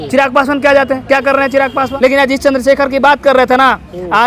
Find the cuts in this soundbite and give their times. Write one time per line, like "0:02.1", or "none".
0:01.9